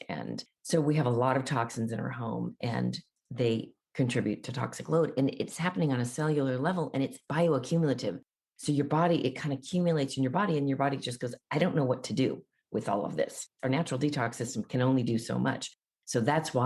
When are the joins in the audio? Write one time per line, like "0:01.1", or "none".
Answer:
none